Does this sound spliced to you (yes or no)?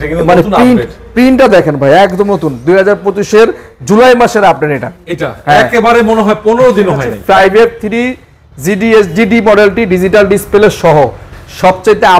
yes